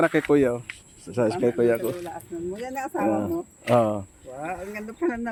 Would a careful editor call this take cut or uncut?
uncut